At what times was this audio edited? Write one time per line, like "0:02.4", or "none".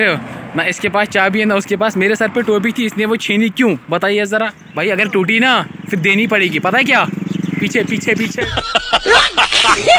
0:04.6
0:08.4